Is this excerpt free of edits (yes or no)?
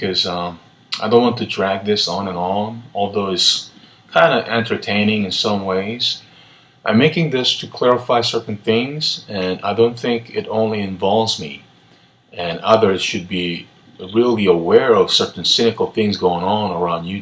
no